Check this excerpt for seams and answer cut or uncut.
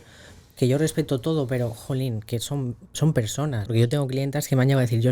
cut